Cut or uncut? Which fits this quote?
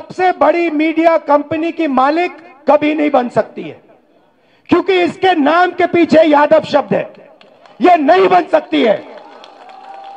uncut